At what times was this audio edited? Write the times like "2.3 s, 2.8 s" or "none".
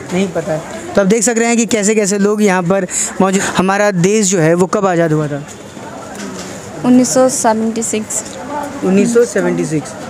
3.4 s